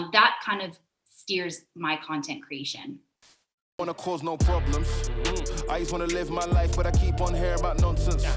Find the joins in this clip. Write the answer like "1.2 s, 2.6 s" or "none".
3.6 s